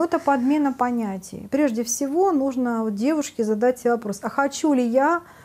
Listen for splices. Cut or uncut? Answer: cut